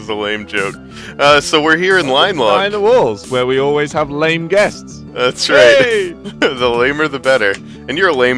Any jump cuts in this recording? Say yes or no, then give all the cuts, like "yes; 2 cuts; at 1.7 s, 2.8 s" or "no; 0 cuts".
yes; 1 cut; at 1.4 s